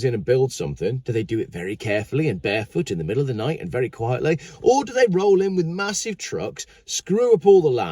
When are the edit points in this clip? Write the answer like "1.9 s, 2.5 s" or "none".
1.0 s